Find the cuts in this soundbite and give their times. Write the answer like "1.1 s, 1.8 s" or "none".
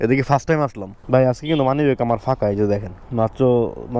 0.9 s